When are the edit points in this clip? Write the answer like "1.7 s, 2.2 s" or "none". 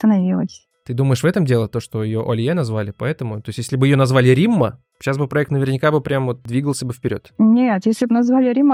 none